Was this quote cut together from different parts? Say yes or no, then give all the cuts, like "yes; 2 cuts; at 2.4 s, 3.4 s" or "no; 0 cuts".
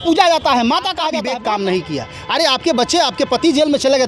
yes; 1 cut; at 1.1 s